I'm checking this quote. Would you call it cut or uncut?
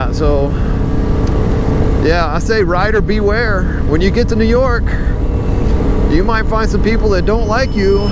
uncut